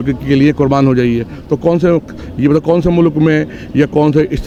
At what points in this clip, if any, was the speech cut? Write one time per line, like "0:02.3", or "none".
none

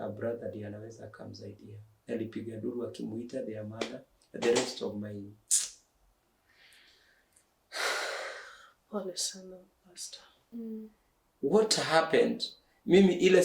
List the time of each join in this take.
0:10.5

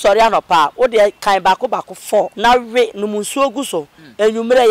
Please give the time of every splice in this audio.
0:02.3

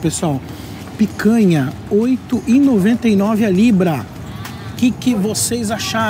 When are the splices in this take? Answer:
none

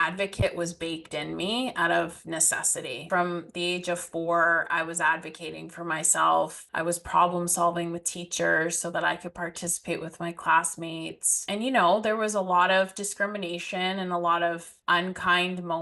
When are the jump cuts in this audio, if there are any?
0:03.0
0:06.6
0:11.4
0:14.7

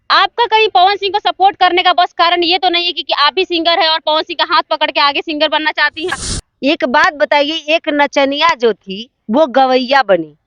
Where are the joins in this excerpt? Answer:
0:06.3

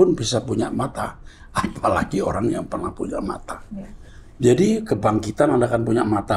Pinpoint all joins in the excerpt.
none

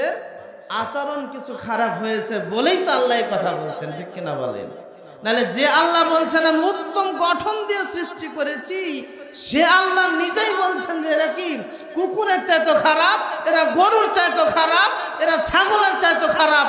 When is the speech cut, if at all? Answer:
none

